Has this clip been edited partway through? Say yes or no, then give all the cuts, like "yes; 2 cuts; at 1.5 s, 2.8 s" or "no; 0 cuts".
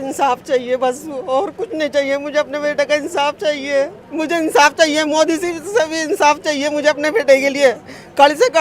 yes; 1 cut; at 4.0 s